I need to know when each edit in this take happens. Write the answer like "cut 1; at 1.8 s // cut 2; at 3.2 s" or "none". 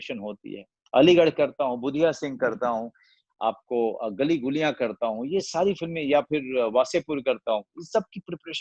none